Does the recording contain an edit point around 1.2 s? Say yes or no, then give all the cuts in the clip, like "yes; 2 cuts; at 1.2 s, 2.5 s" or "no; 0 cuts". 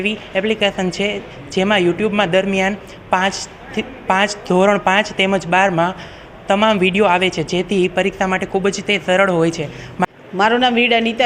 no; 1 cut; at 10.1 s